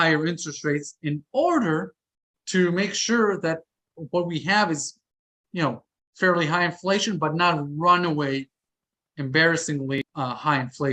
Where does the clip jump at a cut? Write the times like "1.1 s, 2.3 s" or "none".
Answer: 10.0 s